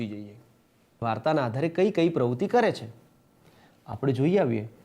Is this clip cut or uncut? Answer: cut